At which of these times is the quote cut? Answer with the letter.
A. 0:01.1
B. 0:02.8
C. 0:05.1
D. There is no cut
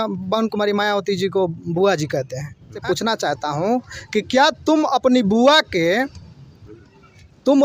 B